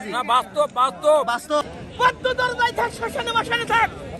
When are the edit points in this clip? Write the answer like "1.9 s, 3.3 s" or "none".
1.6 s